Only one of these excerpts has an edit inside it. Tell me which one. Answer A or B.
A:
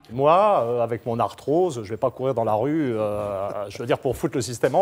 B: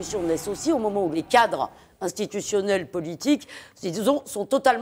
B